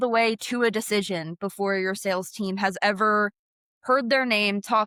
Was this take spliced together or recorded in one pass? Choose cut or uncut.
uncut